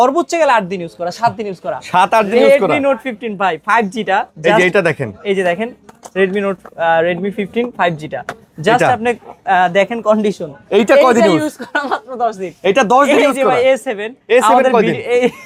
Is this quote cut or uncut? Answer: uncut